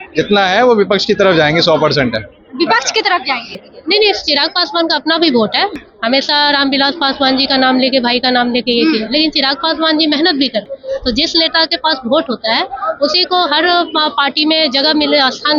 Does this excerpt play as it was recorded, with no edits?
no; 3 cuts; at 3.6 s, 5.8 s, 10.7 s

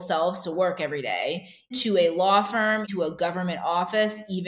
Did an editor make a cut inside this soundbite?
yes; 2 cuts; at 1.8 s, 2.9 s

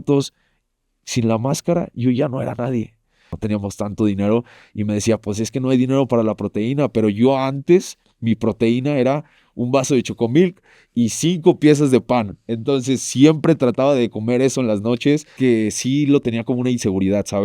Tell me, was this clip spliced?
yes; 2 cuts; at 3.3 s, 15.3 s

